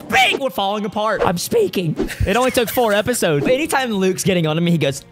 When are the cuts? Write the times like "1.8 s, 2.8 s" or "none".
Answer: 1.2 s, 3.4 s